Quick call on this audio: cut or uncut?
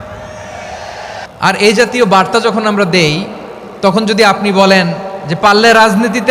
cut